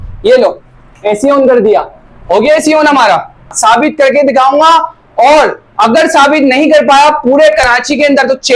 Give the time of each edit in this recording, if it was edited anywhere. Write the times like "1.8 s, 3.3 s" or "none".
3.5 s